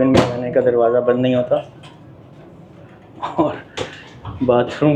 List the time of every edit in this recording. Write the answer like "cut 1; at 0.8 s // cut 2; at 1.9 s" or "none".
none